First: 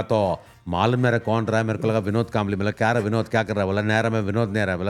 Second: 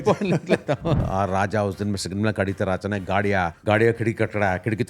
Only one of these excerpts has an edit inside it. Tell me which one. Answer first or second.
second